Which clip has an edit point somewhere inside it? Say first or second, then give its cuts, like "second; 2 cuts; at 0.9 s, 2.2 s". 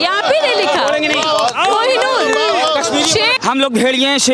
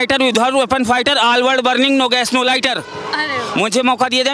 first; 1 cut; at 3.4 s